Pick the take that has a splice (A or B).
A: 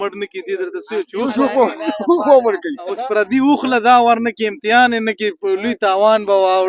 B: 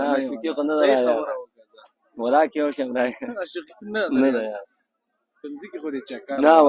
A